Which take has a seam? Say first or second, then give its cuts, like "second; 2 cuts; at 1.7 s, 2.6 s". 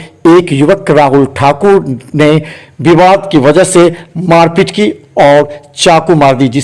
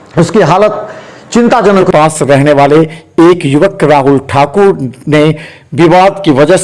second; 1 cut; at 1.8 s